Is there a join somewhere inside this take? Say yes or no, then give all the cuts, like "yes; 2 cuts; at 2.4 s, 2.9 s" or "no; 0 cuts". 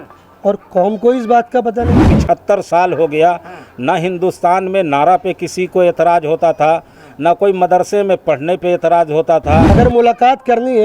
yes; 2 cuts; at 2.1 s, 9.7 s